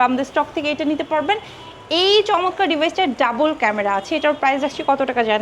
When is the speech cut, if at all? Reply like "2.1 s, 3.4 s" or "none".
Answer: none